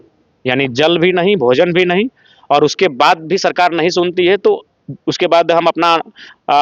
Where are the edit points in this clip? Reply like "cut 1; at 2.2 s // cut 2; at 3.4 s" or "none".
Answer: none